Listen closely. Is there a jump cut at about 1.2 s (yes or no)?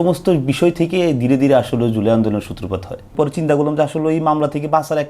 no